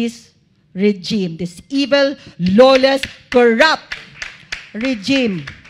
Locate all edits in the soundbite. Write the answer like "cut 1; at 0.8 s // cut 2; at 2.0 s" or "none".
none